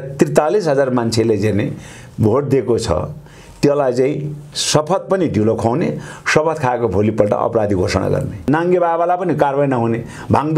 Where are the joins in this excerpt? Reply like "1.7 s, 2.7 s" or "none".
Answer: 8.4 s